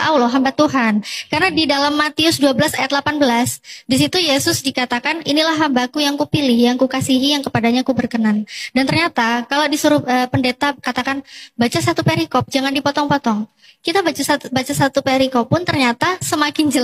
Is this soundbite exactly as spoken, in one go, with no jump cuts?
yes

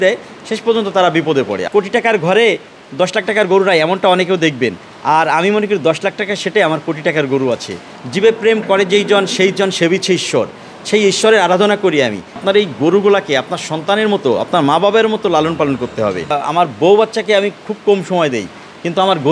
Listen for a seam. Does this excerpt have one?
yes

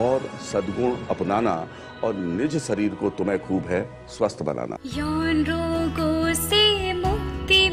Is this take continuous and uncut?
no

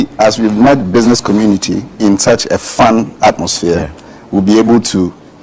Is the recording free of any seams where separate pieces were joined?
no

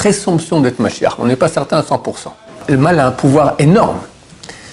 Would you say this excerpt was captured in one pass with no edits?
no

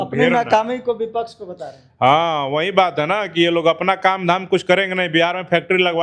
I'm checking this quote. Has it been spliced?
no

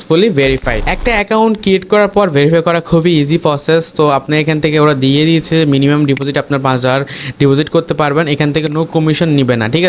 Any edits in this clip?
yes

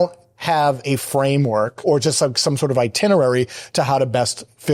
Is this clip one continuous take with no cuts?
no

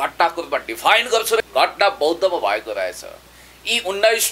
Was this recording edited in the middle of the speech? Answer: yes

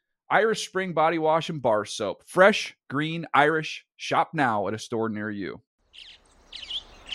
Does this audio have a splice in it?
yes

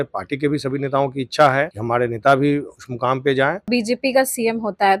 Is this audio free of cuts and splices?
no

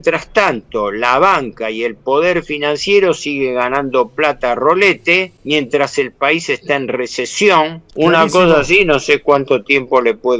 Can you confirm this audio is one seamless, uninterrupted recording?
no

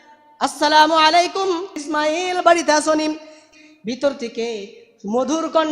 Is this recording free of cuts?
no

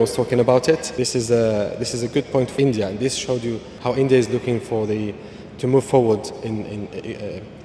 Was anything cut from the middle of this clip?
yes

